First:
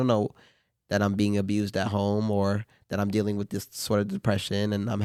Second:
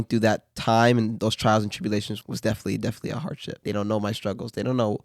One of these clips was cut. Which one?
second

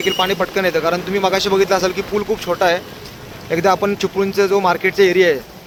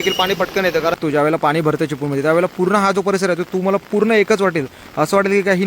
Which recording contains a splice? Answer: second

